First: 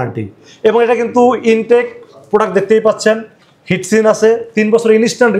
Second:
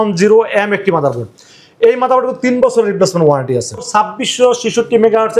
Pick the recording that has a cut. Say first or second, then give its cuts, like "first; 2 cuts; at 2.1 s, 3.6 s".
second; 1 cut; at 3.8 s